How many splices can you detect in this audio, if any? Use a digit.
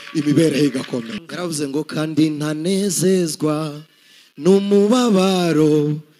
1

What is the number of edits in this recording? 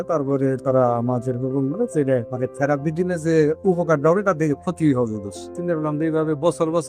2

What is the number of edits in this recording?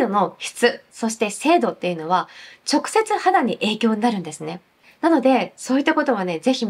0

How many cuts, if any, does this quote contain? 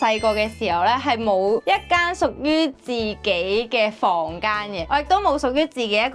0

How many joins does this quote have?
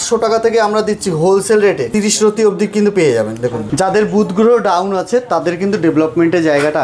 2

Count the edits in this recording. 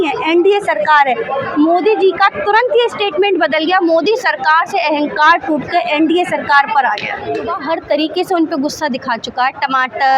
1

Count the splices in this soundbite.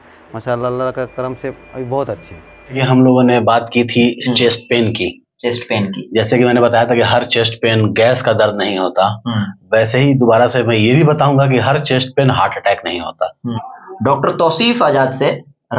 2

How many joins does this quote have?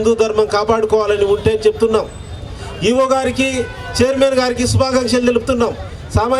0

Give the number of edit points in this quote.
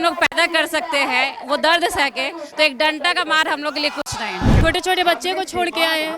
1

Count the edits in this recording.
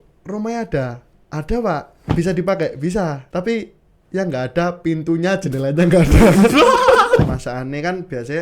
3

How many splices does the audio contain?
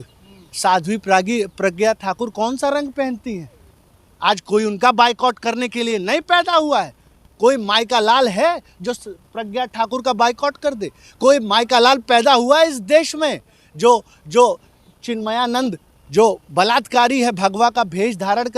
0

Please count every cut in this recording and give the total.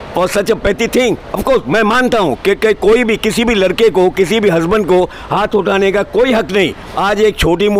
1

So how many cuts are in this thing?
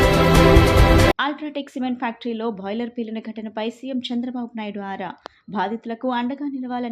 1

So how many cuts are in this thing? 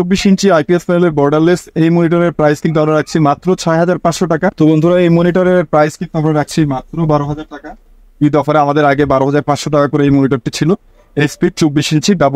1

